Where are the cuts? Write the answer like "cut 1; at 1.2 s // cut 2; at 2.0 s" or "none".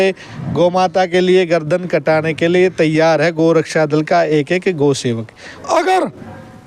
cut 1; at 5.5 s